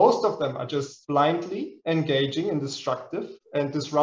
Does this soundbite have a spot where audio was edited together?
no; 0 cuts

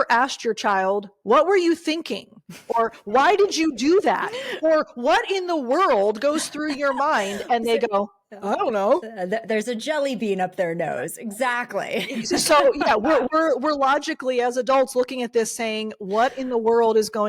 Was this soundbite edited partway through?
no; 0 cuts

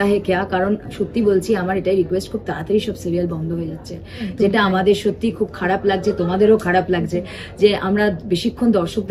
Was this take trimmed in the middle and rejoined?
no; 0 cuts

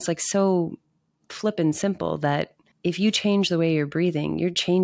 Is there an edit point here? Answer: yes; 1 cut; at 2.6 s

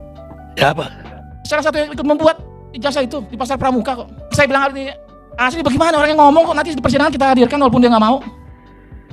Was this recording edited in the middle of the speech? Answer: yes; 1 cut; at 4.3 s

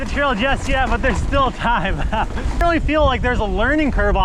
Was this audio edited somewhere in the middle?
yes; 1 cut; at 2.6 s

